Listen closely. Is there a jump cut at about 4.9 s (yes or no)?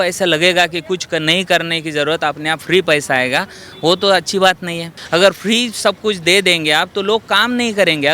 yes